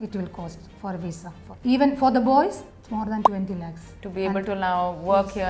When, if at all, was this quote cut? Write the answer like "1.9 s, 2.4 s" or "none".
1.4 s, 2.6 s, 4.0 s